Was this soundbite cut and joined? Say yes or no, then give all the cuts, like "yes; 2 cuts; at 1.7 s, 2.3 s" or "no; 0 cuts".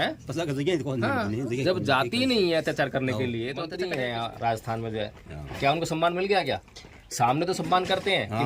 yes; 1 cut; at 3.7 s